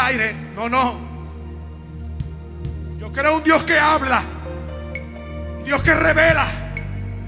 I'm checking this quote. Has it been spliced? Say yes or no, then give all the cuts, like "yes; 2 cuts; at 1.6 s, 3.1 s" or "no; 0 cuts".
no; 0 cuts